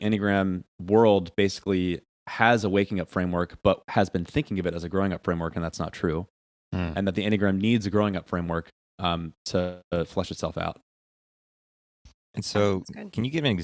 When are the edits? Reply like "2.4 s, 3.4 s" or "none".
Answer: none